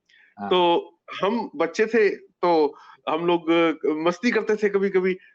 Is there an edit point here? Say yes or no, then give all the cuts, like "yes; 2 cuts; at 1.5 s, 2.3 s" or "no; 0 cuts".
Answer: no; 0 cuts